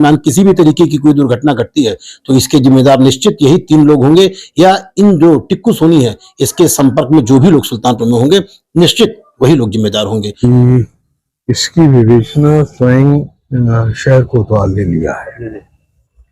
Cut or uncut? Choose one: cut